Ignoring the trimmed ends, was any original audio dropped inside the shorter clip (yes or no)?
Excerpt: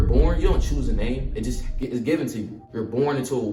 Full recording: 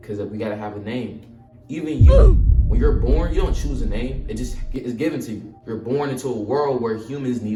no